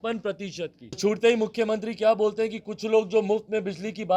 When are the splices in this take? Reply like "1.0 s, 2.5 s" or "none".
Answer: 1.0 s